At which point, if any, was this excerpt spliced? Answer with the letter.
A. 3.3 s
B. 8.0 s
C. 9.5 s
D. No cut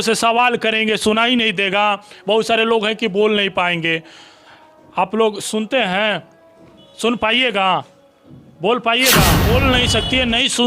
C